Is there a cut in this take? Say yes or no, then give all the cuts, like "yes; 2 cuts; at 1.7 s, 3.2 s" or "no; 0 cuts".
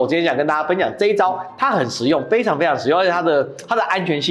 no; 0 cuts